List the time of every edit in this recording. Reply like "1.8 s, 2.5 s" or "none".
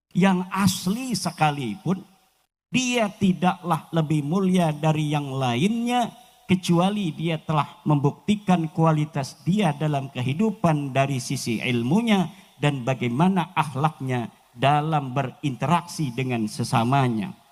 none